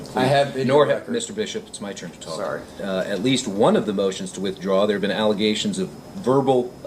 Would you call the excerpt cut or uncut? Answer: cut